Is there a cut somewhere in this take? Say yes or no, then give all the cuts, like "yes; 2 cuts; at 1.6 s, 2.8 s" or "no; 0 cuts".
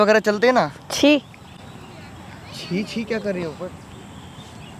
no; 0 cuts